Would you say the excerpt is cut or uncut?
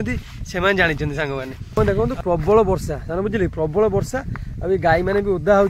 cut